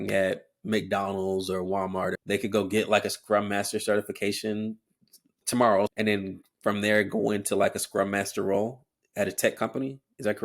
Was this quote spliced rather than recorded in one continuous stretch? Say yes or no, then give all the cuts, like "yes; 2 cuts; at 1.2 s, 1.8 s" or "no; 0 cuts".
yes; 2 cuts; at 2.2 s, 5.9 s